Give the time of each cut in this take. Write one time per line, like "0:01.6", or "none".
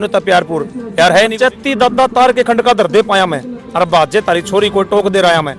0:01.3